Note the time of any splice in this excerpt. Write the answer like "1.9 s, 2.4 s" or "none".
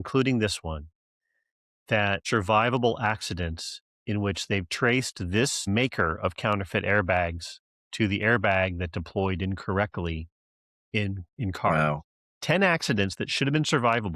2.2 s